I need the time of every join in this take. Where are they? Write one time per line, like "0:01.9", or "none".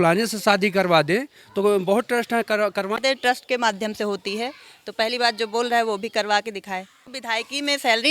0:03.0
0:07.0